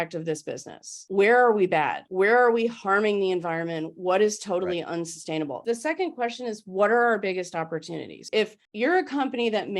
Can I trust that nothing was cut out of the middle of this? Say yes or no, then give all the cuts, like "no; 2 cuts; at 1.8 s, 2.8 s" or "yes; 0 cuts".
no; 3 cuts; at 1.0 s, 2.0 s, 5.5 s